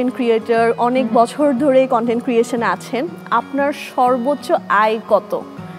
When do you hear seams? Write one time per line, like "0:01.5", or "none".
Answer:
none